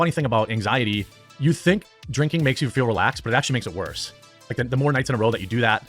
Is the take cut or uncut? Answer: cut